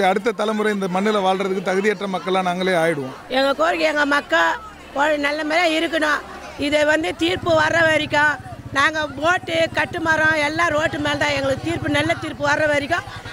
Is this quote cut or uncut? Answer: cut